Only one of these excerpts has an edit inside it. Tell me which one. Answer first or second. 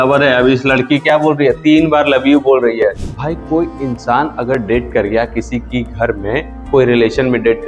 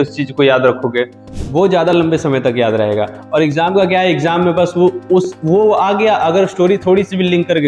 first